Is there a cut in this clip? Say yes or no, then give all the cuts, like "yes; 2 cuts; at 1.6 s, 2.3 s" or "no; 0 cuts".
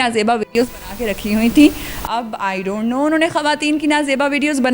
no; 0 cuts